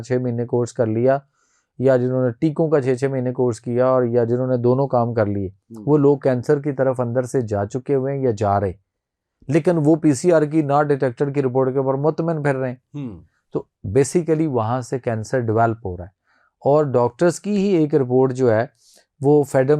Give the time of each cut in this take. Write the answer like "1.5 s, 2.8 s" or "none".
none

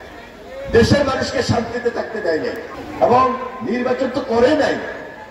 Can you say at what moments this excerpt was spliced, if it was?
2.7 s

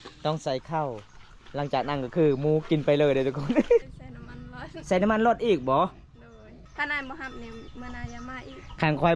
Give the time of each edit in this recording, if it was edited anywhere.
3.8 s, 6.5 s

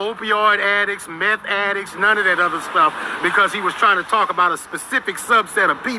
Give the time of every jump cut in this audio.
3.4 s

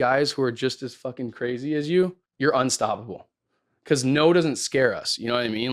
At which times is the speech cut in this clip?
2.2 s

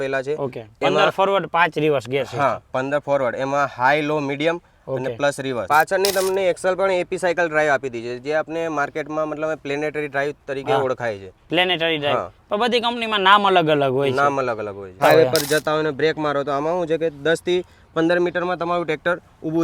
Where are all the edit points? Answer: 5.6 s, 15.0 s

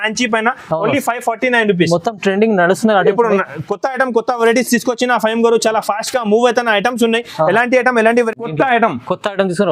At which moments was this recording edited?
8.5 s

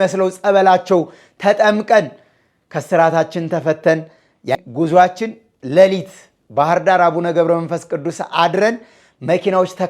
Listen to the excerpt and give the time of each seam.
4.5 s

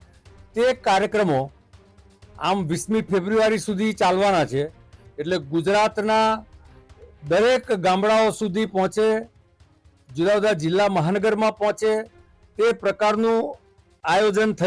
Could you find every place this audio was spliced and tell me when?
none

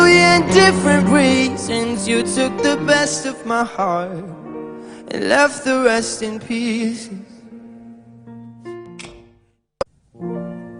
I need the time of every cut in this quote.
9.8 s

